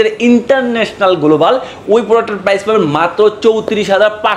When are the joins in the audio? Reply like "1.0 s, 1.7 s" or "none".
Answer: none